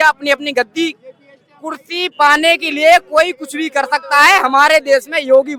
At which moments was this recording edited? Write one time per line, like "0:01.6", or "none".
none